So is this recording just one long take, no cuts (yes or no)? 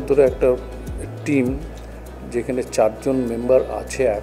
yes